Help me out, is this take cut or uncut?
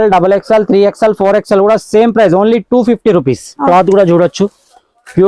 cut